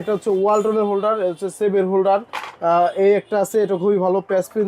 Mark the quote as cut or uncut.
uncut